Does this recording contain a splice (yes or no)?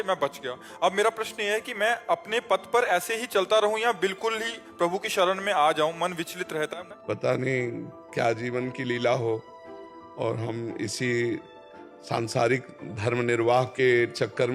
no